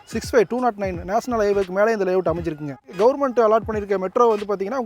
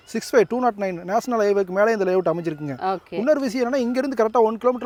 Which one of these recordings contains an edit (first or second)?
first